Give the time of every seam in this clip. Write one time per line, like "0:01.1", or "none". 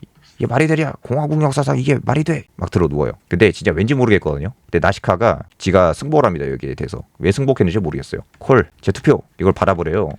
0:02.5
0:05.5
0:08.2

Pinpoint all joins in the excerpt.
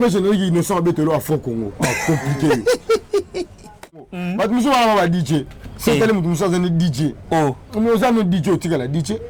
0:04.1

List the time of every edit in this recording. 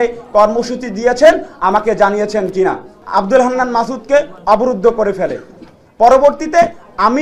0:02.9

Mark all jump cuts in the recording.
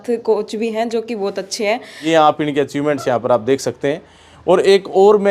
0:02.0

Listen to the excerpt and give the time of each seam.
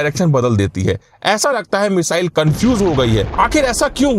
0:03.3

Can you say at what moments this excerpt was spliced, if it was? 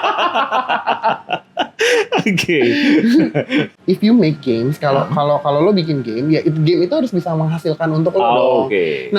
0:03.7

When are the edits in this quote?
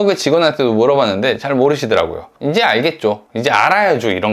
0:02.3

